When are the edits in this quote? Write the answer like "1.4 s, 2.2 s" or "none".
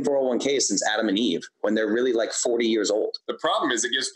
3.2 s